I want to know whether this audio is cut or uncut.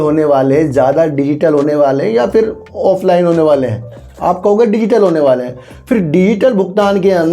uncut